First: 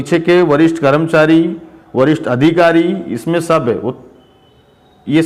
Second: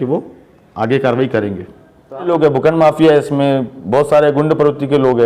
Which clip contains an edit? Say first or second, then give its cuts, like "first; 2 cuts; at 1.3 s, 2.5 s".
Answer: second; 1 cut; at 2.3 s